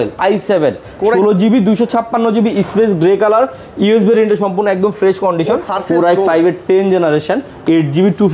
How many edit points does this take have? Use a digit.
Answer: 1